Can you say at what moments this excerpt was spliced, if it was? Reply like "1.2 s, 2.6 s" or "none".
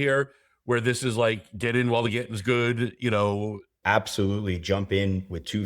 3.7 s